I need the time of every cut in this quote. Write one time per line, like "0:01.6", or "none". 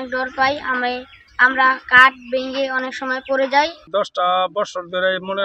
0:03.8